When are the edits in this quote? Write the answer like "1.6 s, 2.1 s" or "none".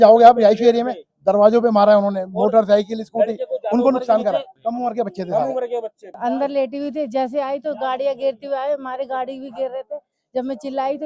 4.5 s, 6.1 s